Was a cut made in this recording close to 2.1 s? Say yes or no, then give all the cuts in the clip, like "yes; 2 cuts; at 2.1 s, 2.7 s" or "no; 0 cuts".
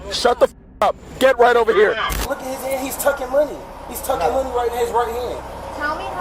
yes; 1 cut; at 2.1 s